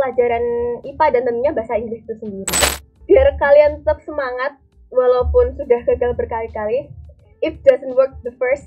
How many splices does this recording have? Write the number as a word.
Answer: one